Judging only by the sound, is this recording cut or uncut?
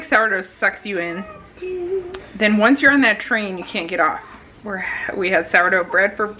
uncut